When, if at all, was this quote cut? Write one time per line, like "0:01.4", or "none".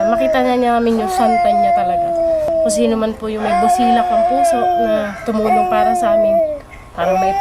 0:02.5

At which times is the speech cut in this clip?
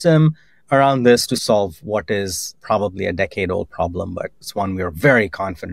0:01.4
0:02.5
0:04.4

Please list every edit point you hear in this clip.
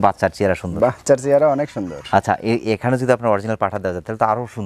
none

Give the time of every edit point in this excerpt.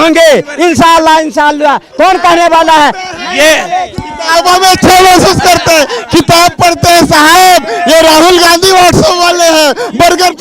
none

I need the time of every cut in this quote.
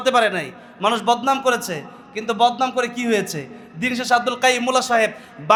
none

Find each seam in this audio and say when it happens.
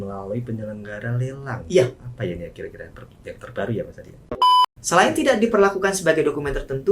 0:04.2

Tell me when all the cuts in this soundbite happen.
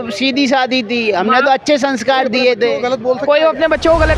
none

